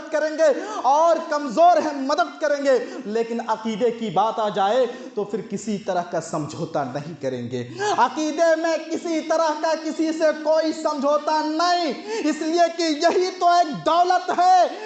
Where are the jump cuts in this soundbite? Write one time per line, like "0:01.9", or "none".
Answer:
none